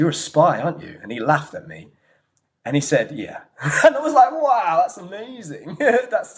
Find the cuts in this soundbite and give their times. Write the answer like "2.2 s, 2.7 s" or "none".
none